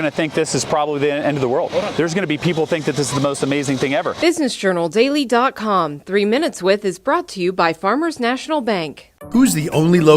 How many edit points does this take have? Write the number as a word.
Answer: one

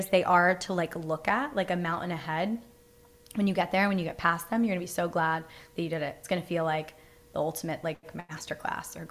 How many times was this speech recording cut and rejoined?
zero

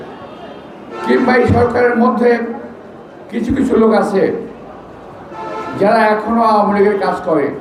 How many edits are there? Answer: zero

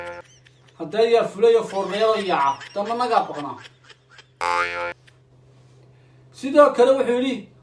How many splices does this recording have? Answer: zero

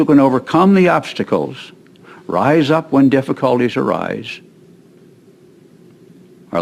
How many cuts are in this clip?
zero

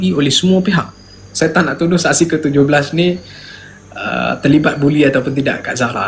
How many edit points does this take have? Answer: one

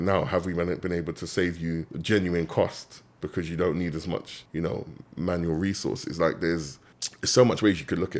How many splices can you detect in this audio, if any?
two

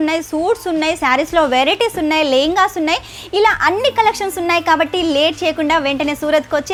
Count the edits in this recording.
zero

